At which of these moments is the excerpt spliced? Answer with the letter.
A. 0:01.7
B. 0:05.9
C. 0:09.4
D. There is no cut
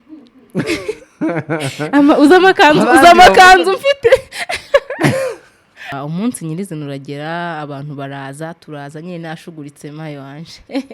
B